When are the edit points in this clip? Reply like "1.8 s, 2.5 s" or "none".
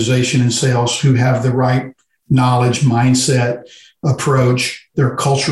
4.0 s